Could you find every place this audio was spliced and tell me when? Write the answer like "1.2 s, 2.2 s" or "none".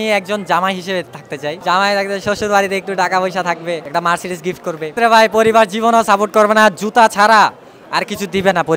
1.6 s, 3.8 s, 4.9 s